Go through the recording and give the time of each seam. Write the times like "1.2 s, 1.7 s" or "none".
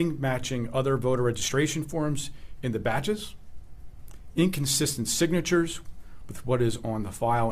none